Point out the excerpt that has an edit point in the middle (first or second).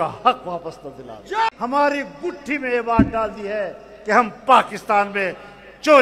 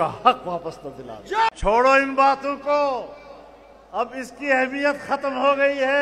first